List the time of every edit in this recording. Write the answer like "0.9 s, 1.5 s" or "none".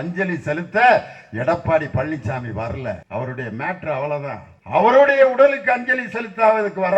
3.0 s, 4.5 s